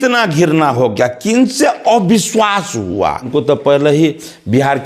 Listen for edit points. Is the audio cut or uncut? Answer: cut